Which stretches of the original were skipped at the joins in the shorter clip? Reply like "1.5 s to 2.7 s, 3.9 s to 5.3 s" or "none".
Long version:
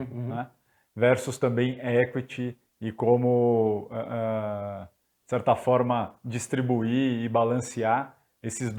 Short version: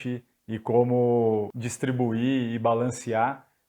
3.9 s to 6.3 s